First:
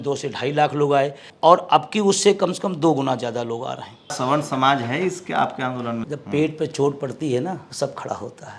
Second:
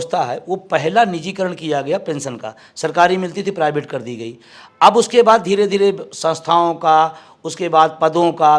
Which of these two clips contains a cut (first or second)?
first